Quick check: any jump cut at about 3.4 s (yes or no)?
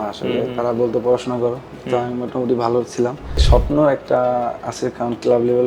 yes